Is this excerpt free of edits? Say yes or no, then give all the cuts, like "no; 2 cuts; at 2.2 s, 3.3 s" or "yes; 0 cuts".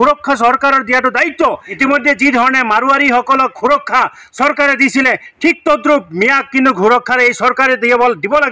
no; 1 cut; at 1.8 s